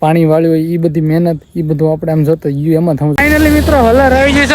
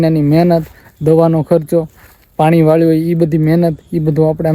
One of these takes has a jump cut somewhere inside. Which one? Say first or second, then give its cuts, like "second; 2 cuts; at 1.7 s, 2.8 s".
first; 1 cut; at 3.1 s